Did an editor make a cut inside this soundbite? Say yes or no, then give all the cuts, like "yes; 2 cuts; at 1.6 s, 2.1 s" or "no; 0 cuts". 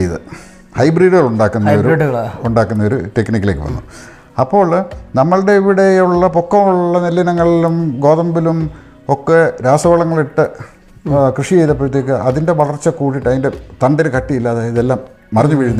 no; 0 cuts